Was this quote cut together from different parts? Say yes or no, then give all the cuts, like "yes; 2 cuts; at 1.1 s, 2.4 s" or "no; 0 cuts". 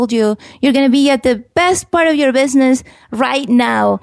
yes; 1 cut; at 1.5 s